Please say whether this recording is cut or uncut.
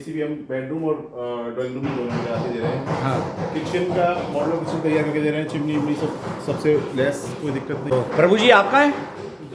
cut